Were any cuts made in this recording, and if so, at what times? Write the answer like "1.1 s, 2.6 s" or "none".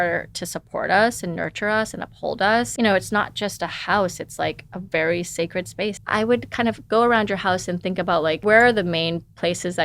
2.7 s, 6.0 s, 8.4 s